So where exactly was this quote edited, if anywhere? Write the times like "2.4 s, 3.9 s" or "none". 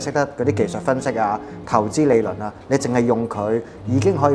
none